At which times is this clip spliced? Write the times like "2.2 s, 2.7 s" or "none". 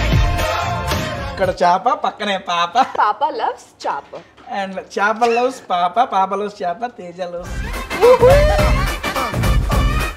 1.2 s, 2.9 s